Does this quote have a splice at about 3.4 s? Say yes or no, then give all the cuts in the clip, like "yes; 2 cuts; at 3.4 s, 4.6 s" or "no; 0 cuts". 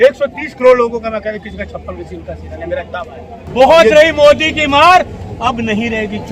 yes; 1 cut; at 3.4 s